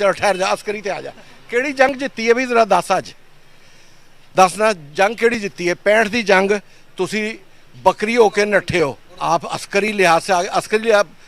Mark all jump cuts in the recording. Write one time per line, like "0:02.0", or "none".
0:09.1